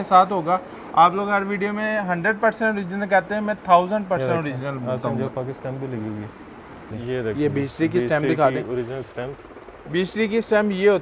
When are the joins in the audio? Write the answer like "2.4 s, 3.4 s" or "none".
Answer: 6.9 s